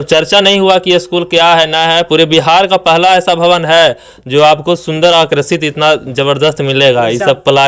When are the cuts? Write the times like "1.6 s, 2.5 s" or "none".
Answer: none